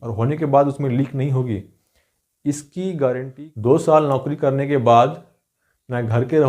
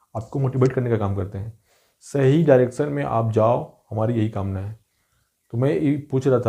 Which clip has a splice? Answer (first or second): first